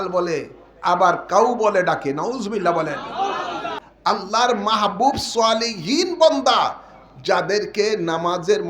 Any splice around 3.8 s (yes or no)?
yes